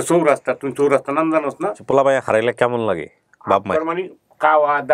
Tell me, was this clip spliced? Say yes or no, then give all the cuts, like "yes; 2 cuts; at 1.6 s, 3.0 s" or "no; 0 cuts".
yes; 1 cut; at 1.7 s